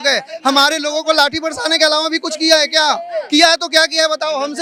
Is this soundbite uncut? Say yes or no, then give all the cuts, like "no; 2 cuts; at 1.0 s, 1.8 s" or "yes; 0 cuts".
yes; 0 cuts